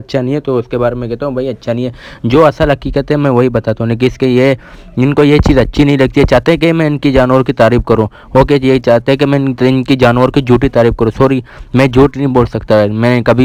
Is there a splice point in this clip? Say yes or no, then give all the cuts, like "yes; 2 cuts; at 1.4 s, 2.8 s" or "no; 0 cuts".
no; 0 cuts